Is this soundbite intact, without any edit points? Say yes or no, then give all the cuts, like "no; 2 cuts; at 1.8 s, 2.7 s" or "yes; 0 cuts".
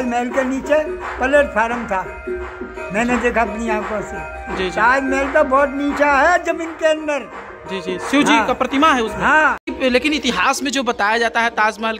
no; 1 cut; at 9.8 s